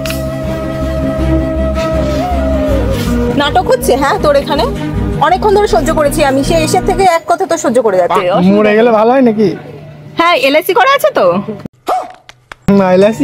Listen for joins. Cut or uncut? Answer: cut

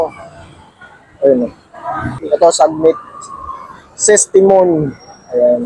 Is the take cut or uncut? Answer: cut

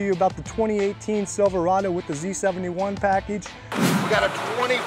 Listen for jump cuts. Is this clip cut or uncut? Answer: cut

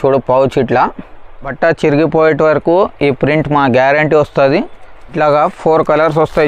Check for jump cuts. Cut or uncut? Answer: cut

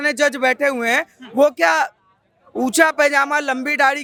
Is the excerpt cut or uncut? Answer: uncut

